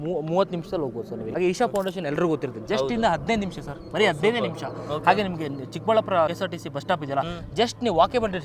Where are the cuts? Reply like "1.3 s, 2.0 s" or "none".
1.3 s, 6.3 s